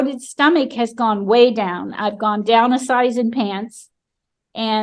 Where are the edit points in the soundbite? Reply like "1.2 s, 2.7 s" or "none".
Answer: none